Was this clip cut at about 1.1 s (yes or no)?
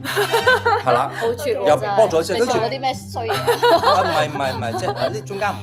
no